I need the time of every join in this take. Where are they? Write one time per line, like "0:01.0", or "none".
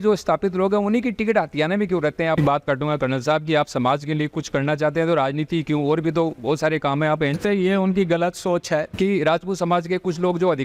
0:02.4
0:07.4
0:08.9